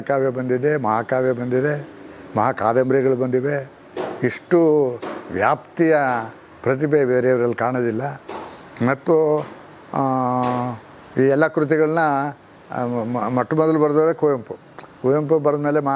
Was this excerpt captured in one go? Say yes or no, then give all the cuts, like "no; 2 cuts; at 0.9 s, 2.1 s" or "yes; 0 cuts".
yes; 0 cuts